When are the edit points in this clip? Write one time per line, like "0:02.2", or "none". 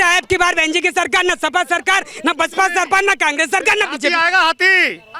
none